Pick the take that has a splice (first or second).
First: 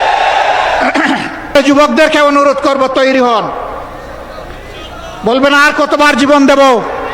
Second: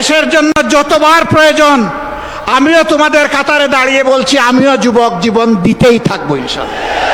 first